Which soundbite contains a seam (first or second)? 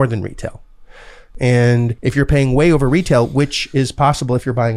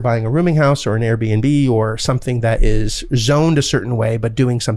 first